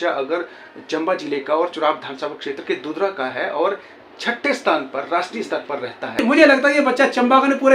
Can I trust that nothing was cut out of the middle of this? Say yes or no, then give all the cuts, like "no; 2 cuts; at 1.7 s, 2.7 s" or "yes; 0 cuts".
no; 1 cut; at 6.2 s